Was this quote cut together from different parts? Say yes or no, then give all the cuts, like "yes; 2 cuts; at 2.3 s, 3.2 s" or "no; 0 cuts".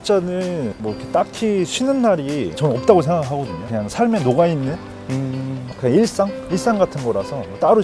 no; 0 cuts